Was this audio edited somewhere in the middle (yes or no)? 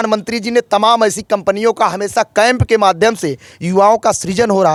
no